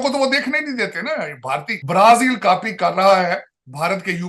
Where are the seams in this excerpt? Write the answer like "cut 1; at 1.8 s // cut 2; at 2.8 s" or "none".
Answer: cut 1; at 1.7 s